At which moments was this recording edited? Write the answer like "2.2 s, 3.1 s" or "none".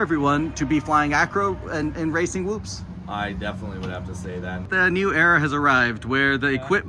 4.7 s